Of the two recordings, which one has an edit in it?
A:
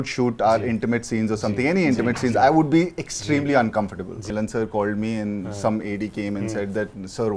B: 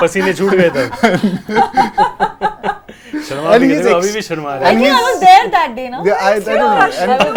A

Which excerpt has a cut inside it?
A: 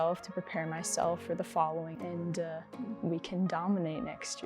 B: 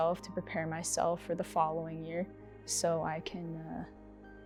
A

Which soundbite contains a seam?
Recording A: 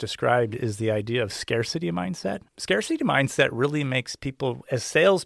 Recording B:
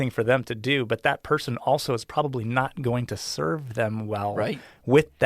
A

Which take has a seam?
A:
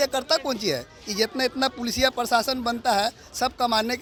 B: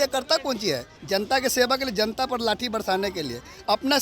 B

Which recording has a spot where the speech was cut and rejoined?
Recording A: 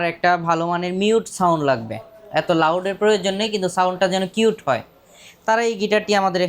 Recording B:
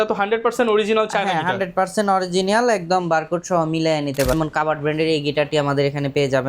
B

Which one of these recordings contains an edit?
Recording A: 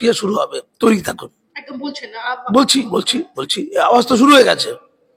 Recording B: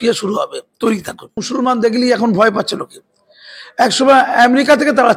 B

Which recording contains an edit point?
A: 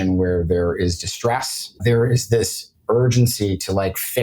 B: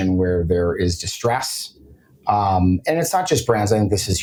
A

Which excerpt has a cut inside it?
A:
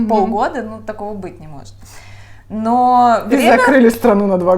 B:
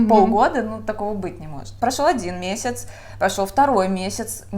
B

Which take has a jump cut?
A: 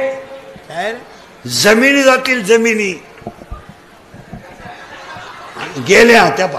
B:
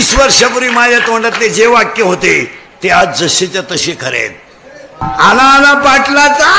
B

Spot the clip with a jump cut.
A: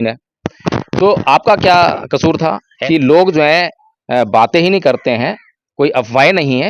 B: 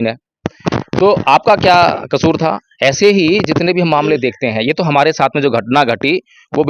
A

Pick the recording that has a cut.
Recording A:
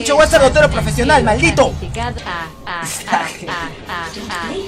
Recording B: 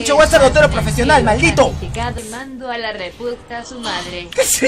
B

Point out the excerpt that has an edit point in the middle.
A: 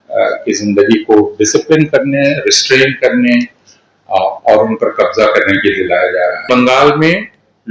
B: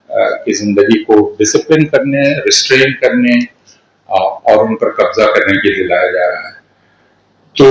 A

